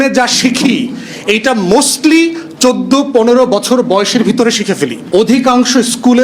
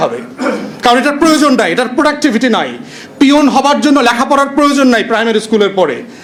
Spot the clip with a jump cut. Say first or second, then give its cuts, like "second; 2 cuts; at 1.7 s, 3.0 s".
first; 1 cut; at 5.0 s